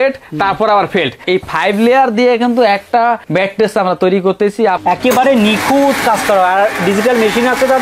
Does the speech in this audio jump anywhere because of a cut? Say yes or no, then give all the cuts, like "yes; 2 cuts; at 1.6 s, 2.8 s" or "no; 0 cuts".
yes; 3 cuts; at 1.2 s, 3.2 s, 4.8 s